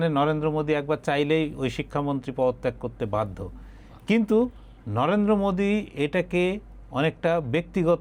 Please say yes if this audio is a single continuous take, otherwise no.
yes